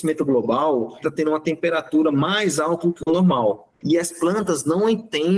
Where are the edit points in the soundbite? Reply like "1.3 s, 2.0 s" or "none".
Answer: 1.0 s, 3.7 s